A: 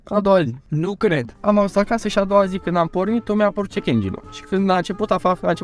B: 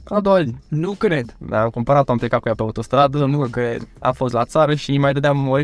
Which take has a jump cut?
A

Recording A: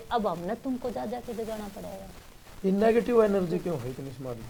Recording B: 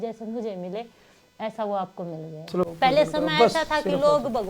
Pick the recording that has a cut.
B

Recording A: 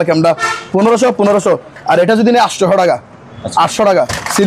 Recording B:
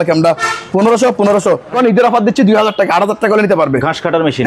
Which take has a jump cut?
B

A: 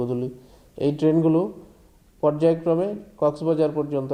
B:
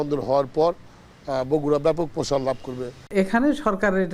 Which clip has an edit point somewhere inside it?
B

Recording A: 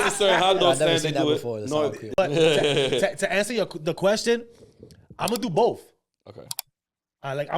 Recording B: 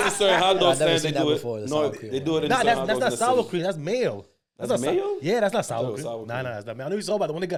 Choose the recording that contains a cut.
A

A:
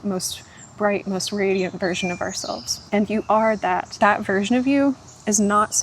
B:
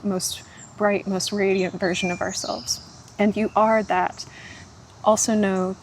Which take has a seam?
A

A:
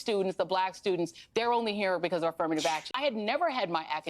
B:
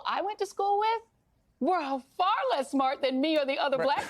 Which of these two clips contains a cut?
A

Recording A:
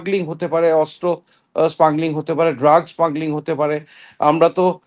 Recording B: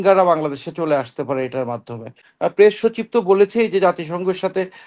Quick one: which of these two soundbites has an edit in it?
B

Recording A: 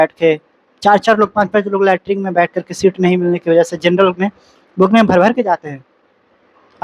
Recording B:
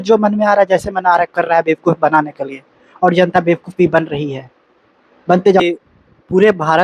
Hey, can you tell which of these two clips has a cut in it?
B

